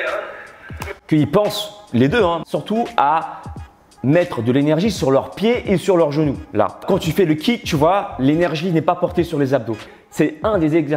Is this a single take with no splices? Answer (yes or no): no